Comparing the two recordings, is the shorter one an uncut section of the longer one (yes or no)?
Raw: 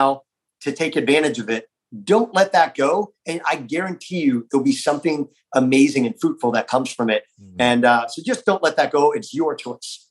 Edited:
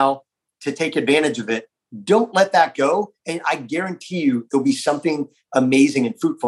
yes